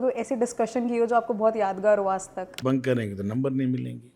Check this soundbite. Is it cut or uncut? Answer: cut